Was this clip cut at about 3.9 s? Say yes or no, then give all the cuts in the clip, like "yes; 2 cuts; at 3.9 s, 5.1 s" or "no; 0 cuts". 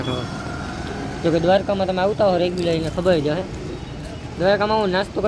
no; 0 cuts